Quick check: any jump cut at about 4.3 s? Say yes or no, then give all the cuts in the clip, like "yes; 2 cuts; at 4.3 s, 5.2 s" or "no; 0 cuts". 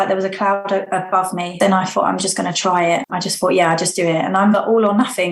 no; 2 cuts; at 1.5 s, 3.1 s